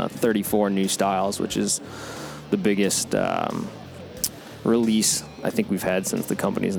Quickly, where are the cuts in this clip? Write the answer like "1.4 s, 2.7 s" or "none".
none